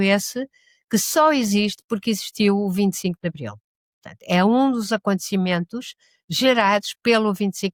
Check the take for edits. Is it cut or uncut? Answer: uncut